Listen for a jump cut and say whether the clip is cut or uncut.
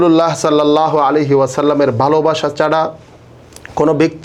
uncut